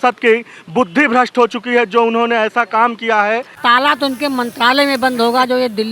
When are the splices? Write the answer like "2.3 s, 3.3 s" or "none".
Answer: 3.6 s